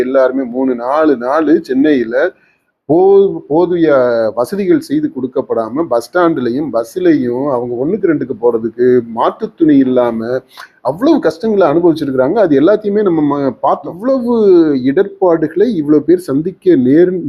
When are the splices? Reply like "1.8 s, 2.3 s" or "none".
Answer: 13.9 s